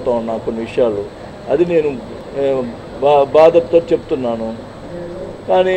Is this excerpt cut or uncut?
uncut